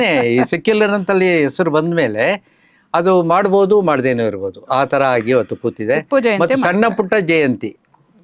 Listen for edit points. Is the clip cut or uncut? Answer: uncut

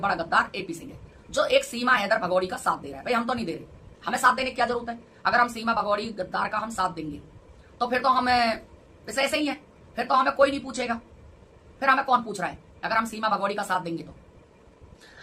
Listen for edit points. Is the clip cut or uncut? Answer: uncut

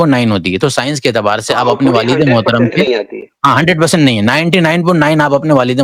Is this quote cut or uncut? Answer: uncut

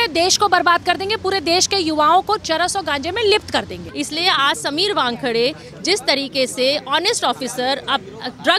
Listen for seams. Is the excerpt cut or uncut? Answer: cut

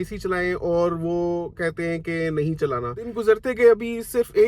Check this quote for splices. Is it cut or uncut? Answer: cut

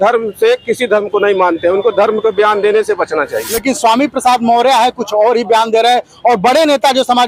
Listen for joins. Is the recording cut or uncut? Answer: cut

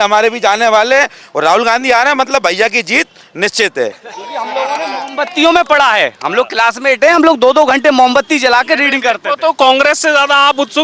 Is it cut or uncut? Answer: uncut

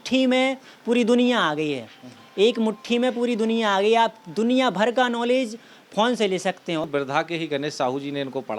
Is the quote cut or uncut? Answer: cut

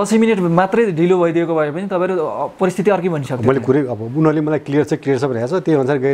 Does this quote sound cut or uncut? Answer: uncut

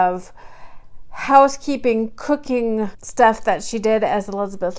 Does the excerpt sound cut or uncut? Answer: cut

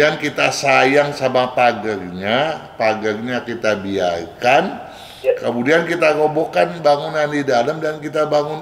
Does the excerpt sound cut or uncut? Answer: uncut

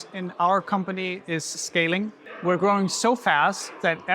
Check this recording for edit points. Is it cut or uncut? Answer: cut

